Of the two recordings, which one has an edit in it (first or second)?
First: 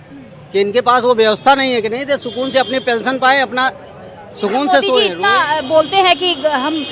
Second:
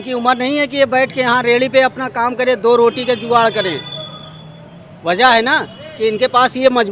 first